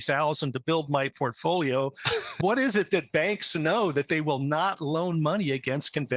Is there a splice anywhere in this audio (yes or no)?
no